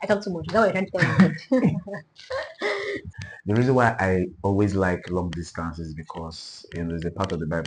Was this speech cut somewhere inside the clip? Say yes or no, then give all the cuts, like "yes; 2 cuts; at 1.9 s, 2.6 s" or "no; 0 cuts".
yes; 1 cut; at 3.1 s